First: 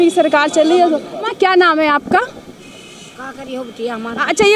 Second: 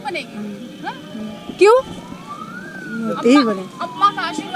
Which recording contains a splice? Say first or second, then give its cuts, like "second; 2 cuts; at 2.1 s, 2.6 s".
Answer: first; 1 cut; at 1.2 s